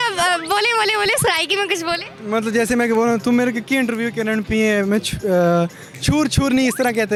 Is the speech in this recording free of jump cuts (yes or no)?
yes